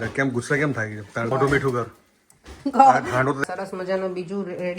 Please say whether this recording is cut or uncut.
cut